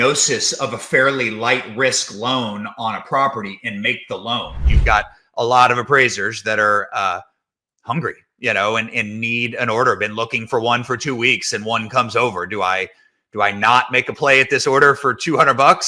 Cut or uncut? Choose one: cut